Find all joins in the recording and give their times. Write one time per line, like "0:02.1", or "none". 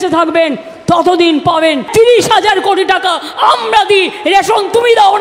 0:01.8